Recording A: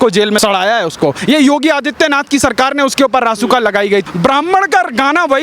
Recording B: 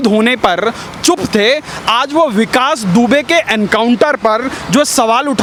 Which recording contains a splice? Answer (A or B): A